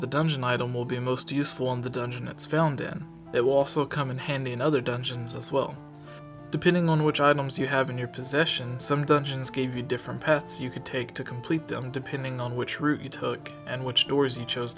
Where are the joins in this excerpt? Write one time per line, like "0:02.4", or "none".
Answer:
0:12.0